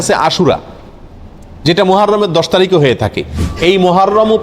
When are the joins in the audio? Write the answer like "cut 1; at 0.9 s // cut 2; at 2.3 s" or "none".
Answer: cut 1; at 3.4 s